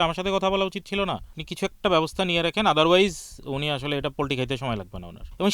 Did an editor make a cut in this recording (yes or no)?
yes